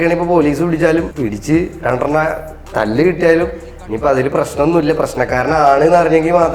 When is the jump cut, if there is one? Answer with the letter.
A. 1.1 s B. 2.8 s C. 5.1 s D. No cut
A